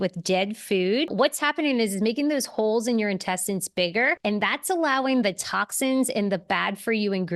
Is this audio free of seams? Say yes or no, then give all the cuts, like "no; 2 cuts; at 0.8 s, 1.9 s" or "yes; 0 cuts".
no; 2 cuts; at 1.1 s, 4.2 s